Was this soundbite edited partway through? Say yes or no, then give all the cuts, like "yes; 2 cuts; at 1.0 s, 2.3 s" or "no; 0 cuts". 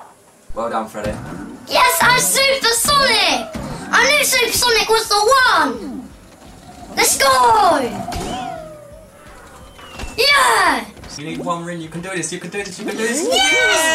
yes; 1 cut; at 11.2 s